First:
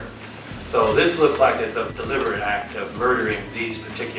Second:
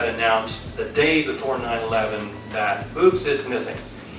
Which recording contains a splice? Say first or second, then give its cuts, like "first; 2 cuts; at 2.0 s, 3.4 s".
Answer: first; 1 cut; at 1.9 s